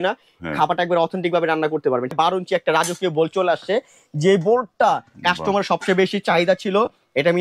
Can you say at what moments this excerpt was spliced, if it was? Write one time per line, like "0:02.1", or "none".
0:02.1